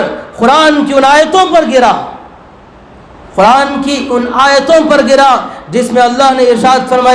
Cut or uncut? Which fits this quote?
uncut